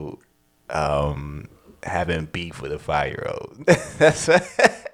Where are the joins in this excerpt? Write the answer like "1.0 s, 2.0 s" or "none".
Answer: none